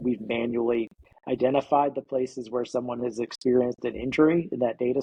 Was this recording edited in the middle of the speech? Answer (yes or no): no